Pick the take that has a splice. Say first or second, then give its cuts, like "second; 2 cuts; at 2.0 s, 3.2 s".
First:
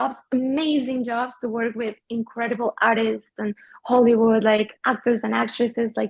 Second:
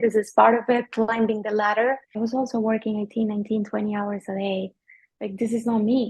second; 2 cuts; at 2.2 s, 5.1 s